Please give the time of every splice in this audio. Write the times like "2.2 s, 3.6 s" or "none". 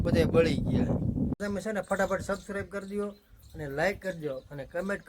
1.4 s